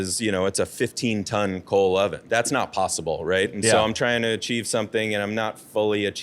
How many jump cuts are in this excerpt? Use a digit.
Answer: 1